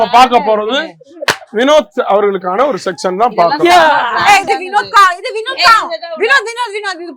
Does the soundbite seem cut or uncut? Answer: uncut